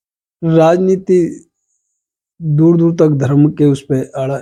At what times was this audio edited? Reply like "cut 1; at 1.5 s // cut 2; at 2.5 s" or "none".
none